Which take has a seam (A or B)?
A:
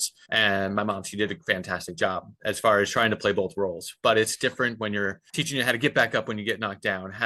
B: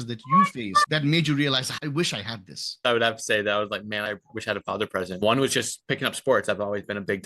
B